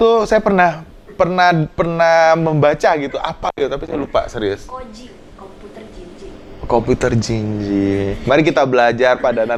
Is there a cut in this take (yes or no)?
no